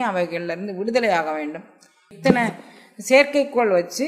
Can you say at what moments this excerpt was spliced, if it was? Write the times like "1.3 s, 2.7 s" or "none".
2.1 s